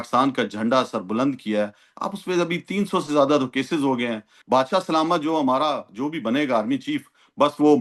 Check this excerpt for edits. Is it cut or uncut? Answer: cut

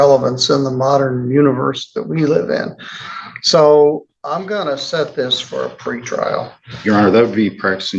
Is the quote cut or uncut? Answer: uncut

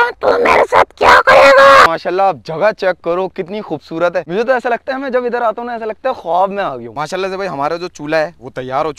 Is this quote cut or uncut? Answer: cut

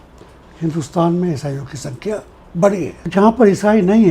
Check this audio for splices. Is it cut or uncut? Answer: cut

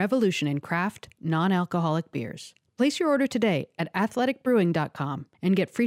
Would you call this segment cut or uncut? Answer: uncut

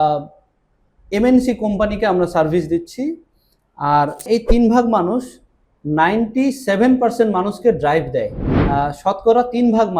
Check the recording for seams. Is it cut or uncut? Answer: cut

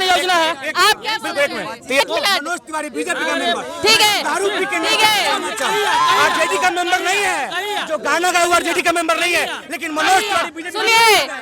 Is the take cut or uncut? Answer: cut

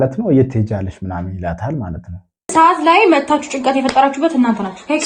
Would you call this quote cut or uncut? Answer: cut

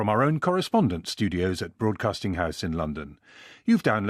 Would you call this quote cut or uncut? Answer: uncut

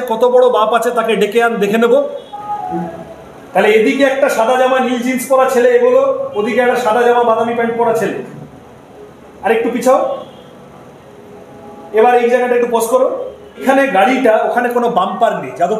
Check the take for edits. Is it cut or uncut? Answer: cut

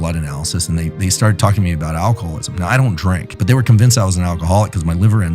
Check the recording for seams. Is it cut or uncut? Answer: cut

